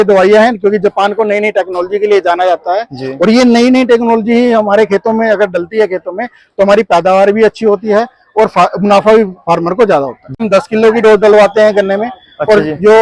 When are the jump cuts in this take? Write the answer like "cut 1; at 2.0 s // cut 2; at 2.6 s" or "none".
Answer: cut 1; at 10.4 s